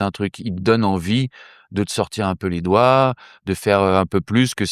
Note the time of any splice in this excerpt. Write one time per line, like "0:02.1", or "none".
none